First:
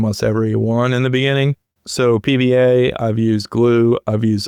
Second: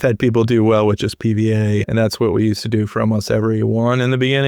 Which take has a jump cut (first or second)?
second